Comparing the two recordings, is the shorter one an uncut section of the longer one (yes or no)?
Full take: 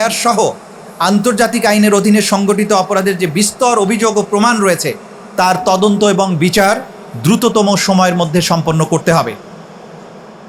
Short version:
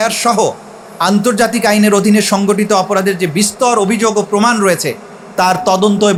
yes